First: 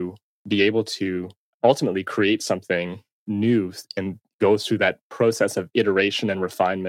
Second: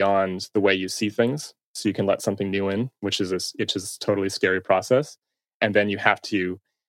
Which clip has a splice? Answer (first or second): first